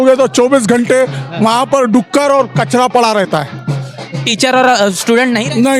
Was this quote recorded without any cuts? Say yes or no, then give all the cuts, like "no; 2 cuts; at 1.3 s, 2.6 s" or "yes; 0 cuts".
yes; 0 cuts